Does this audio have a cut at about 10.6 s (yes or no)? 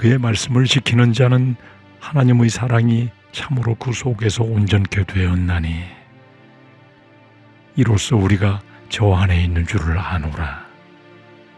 yes